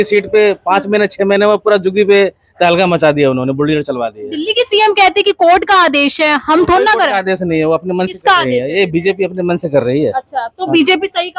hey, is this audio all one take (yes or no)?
yes